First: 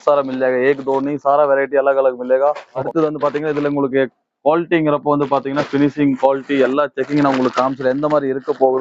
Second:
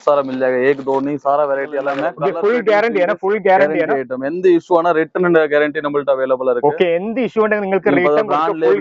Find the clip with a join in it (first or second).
second